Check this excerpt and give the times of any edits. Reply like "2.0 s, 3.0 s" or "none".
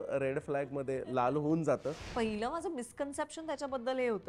2.0 s